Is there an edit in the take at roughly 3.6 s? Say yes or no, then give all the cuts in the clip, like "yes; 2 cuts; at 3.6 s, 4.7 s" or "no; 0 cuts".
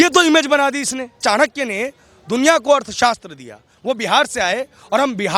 no; 1 cut; at 1.2 s